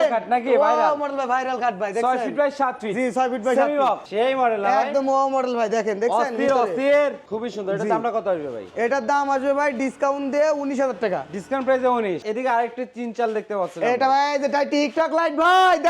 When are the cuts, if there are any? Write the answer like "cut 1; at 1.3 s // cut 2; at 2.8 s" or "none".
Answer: cut 1; at 4.0 s // cut 2; at 7.2 s // cut 3; at 12.2 s